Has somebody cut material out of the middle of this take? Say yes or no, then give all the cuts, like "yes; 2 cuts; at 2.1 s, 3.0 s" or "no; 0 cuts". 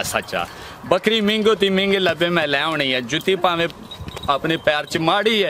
no; 0 cuts